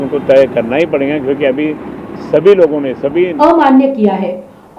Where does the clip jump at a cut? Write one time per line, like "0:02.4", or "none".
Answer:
0:03.3